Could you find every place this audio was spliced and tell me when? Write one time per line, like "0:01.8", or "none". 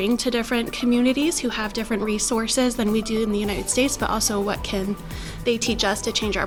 none